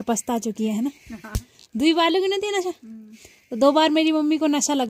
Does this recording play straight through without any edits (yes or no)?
yes